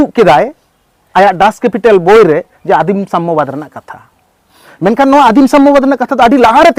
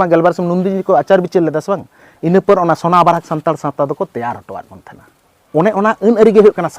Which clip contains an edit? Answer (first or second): second